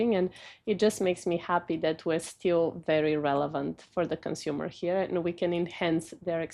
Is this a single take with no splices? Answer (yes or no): yes